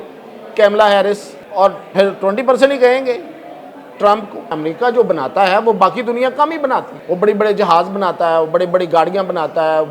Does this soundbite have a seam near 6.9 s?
yes; 3 cuts; at 1.4 s, 4.5 s, 6.9 s

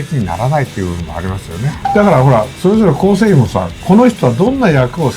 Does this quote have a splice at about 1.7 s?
yes; 1 cut; at 1.7 s

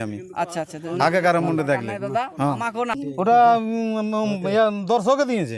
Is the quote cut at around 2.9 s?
yes; 1 cut; at 2.9 s

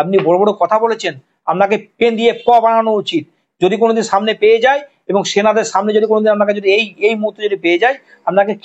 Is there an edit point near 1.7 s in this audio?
no; 0 cuts

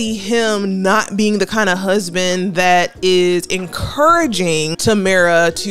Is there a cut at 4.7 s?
yes; 1 cut; at 4.7 s

